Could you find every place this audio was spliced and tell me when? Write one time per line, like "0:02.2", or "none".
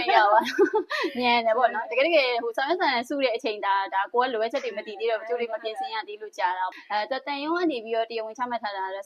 0:06.8